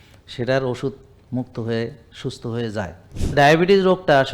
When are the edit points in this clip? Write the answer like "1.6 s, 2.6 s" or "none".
3.3 s